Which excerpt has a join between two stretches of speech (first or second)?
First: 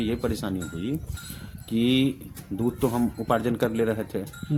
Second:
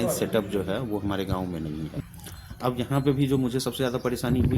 second